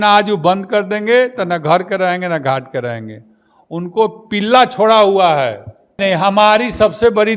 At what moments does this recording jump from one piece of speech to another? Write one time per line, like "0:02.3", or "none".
0:06.0